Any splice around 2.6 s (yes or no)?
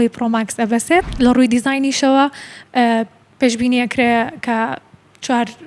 no